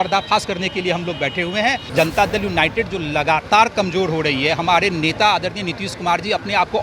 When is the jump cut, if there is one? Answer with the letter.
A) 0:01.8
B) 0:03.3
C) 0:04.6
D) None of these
A